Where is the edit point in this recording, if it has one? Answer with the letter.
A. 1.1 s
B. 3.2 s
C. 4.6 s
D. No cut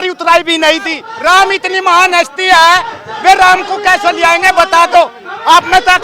A